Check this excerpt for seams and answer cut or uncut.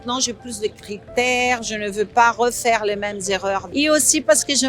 cut